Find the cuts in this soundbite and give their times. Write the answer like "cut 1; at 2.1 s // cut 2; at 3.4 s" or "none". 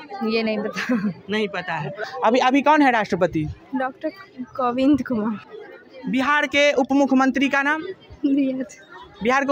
cut 1; at 2.0 s // cut 2; at 5.4 s